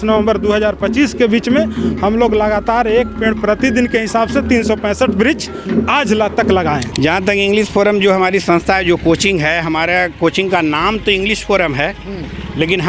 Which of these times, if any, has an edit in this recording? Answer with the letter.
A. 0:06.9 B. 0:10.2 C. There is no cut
A